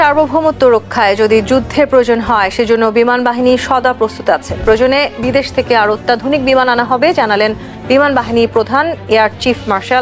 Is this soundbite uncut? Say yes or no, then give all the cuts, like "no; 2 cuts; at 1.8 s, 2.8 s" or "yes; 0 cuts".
yes; 0 cuts